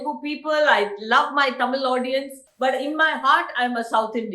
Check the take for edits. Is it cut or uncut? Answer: cut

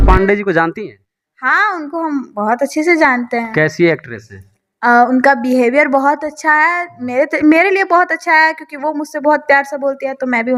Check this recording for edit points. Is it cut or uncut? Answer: uncut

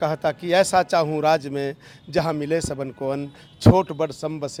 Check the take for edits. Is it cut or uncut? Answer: uncut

